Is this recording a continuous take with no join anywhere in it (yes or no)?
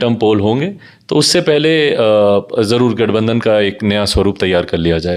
yes